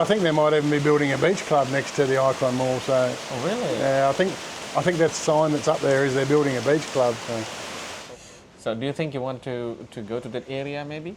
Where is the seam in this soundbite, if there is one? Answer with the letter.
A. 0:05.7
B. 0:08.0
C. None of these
B